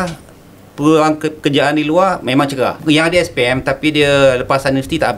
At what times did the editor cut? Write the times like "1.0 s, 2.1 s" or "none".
2.8 s